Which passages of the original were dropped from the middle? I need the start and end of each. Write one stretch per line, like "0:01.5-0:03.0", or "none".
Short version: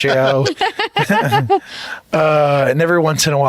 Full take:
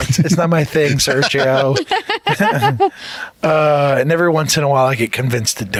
none